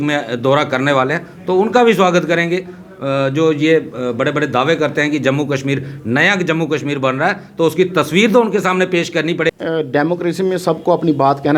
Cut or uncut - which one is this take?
cut